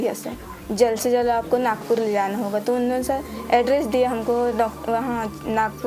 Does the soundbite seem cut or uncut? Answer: uncut